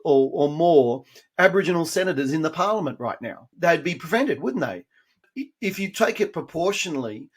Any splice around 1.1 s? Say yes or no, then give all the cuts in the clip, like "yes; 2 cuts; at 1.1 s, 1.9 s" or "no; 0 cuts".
no; 2 cuts; at 3.5 s, 5.3 s